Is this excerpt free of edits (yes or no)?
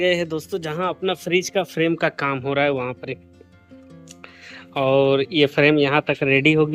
yes